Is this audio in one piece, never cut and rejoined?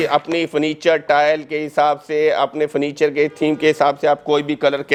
yes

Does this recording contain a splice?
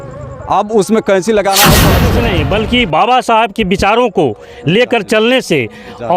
yes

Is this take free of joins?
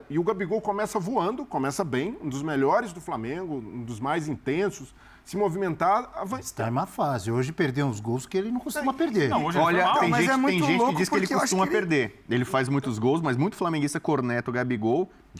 yes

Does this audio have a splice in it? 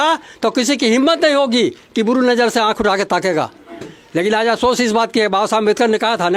no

